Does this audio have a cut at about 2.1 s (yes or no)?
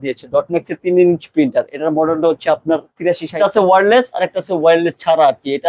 no